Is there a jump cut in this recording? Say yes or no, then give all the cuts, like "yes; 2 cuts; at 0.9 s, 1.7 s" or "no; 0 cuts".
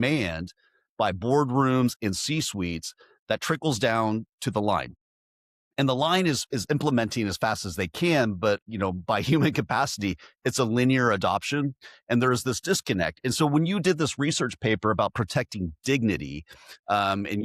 no; 0 cuts